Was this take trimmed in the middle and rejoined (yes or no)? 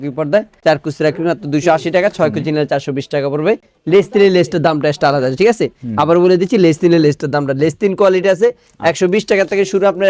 no